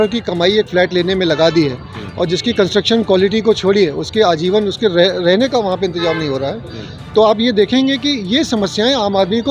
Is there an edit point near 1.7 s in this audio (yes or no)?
no